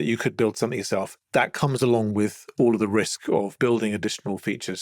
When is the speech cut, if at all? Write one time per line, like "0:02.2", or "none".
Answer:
none